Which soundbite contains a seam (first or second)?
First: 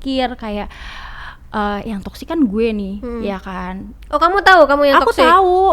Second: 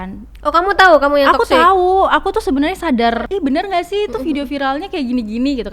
second